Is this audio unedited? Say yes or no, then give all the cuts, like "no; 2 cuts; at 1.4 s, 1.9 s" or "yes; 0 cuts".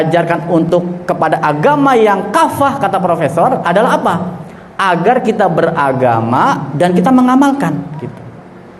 yes; 0 cuts